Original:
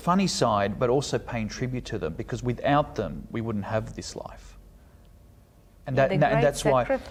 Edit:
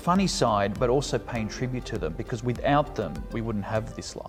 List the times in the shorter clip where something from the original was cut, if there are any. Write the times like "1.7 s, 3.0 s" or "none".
none